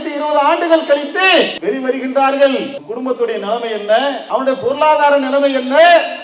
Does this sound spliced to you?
yes; 3 cuts; at 1.6 s, 2.8 s, 4.2 s

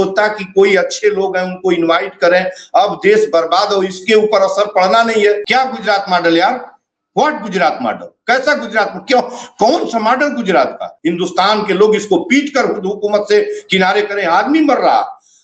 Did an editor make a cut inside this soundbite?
yes; 2 cuts; at 5.4 s, 10.9 s

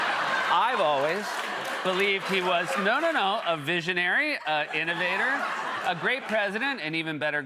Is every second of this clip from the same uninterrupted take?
yes; 0 cuts

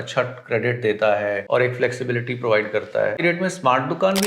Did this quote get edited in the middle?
yes; 2 cuts; at 1.4 s, 3.2 s

